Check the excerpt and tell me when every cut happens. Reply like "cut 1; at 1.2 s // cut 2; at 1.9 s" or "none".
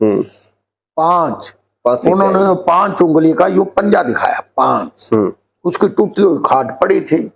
cut 1; at 5.5 s